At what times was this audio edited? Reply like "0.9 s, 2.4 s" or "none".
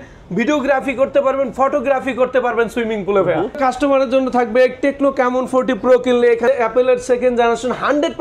3.6 s, 6.4 s